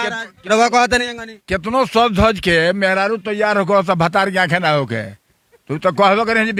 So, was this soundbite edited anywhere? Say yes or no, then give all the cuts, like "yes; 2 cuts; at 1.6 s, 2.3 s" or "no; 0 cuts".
no; 0 cuts